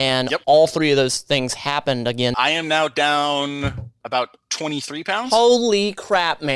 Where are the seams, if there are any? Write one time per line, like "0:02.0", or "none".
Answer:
0:02.4